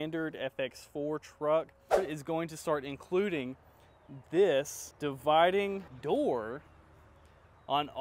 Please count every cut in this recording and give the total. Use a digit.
3